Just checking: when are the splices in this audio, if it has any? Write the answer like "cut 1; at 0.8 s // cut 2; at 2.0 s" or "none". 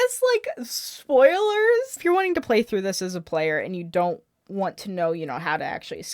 cut 1; at 2.0 s